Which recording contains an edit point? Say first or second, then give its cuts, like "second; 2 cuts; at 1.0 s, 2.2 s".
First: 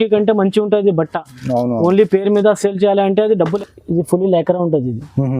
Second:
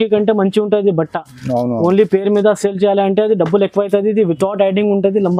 first; 1 cut; at 3.5 s